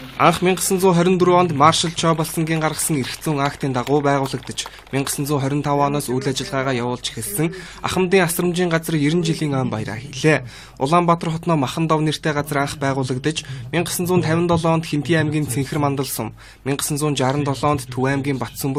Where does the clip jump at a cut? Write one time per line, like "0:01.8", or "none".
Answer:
none

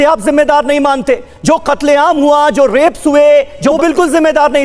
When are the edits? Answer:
0:03.8

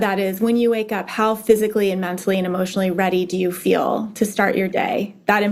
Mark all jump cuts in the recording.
none

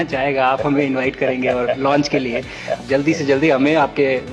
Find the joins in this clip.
0:02.8

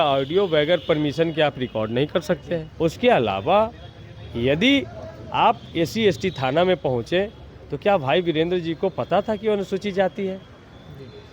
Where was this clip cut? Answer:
0:02.7

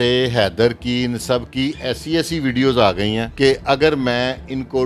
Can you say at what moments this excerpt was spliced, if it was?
0:03.3

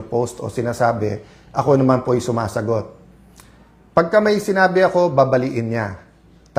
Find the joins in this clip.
none

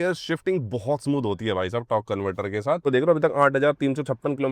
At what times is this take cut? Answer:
0:02.8

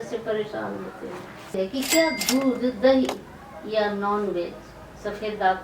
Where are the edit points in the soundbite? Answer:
0:01.5

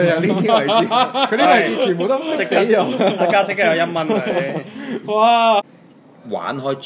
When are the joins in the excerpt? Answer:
0:05.7

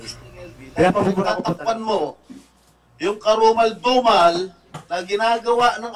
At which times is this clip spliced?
0:01.4

